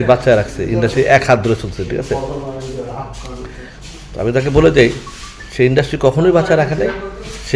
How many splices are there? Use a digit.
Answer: 0